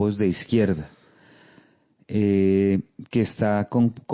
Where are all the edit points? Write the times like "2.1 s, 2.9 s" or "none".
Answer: none